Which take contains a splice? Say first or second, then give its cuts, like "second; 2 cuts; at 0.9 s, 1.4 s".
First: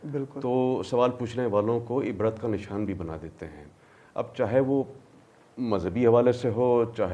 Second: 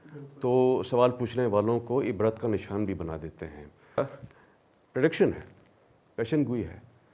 second; 1 cut; at 4.0 s